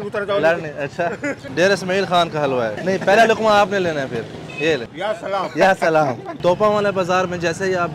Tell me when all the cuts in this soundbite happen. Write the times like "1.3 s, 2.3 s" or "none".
1.4 s, 2.8 s, 4.9 s, 6.4 s